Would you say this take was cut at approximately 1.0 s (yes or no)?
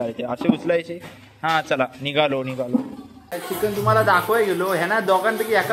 no